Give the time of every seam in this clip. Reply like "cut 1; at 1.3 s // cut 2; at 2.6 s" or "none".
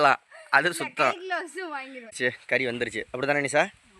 cut 1; at 2.1 s